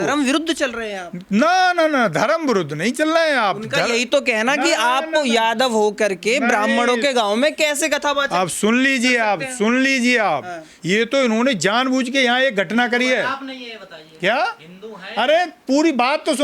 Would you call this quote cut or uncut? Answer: cut